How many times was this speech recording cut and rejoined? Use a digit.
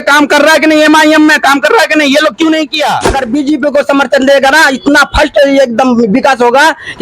1